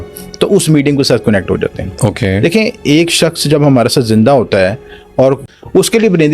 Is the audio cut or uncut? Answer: cut